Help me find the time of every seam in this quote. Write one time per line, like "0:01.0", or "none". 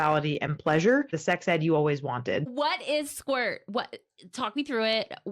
0:01.1
0:02.4

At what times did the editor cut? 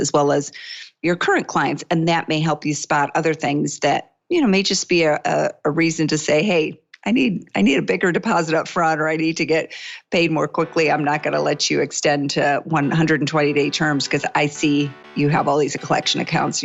none

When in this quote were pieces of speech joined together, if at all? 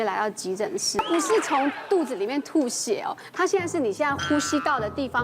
0:01.0

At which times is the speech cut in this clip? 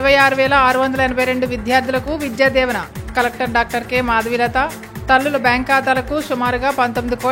none

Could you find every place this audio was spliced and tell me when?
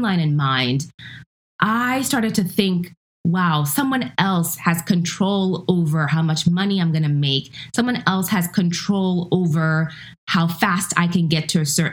none

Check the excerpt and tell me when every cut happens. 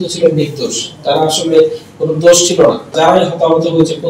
0:02.9

